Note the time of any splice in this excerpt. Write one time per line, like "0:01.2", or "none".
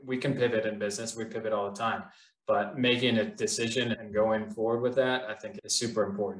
0:04.0
0:05.5